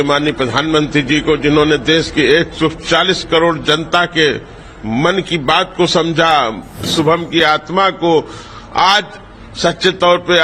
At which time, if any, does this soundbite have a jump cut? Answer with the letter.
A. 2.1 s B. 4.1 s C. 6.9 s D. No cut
C